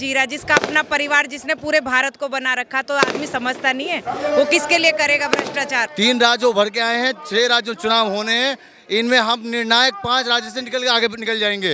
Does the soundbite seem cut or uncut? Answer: cut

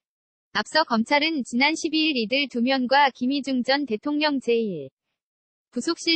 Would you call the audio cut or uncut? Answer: uncut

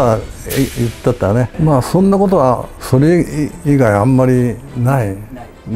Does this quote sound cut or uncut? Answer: cut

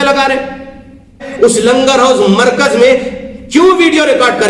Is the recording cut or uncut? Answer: cut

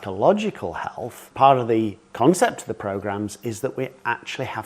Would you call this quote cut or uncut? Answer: cut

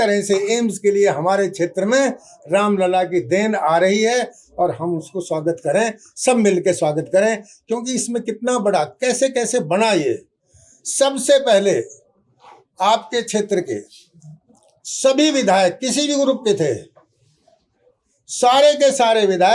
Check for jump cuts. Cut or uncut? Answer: uncut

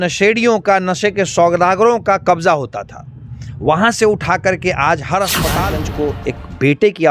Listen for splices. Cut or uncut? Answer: cut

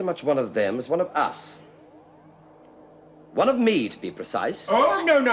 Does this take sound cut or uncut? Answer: uncut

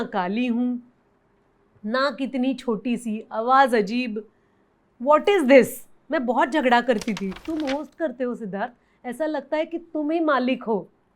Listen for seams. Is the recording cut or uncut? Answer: cut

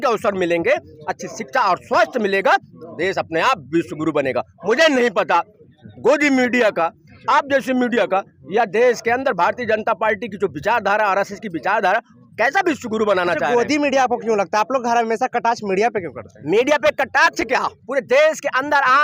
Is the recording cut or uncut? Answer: uncut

